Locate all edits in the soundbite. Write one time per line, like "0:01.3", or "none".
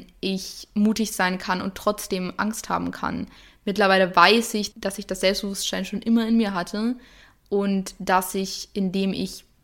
0:03.4